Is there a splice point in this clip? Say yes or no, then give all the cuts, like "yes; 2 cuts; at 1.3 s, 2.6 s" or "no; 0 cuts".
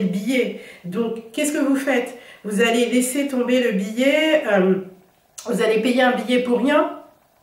no; 0 cuts